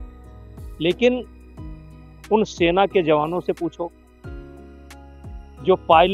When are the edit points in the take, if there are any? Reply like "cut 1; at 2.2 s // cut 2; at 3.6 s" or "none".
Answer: none

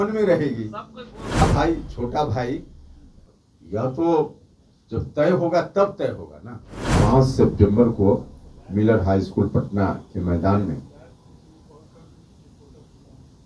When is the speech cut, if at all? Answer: cut 1; at 1.4 s // cut 2; at 6.9 s

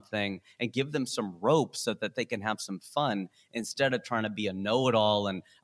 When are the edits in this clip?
none

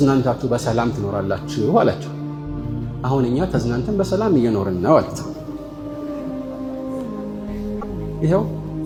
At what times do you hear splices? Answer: none

